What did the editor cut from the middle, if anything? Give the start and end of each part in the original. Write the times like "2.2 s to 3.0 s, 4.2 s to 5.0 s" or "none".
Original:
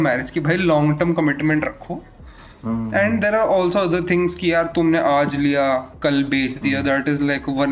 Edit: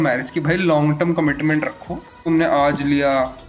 2.2 s to 4.8 s